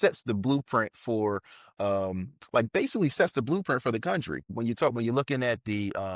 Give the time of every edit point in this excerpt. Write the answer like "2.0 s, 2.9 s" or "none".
4.4 s